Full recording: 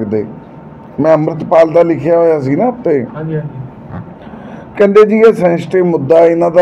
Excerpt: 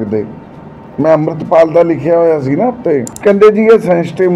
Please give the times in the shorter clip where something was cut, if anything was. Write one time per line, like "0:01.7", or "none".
0:03.1